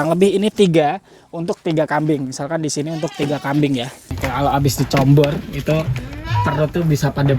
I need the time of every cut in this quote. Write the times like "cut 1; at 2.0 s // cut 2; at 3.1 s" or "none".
cut 1; at 4.1 s